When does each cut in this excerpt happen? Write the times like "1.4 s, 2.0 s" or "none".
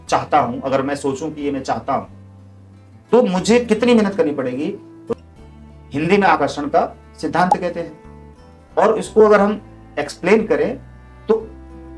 5.1 s